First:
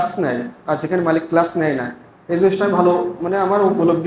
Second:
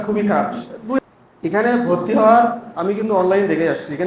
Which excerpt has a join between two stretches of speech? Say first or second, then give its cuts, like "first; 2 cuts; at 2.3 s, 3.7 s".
second; 1 cut; at 1.0 s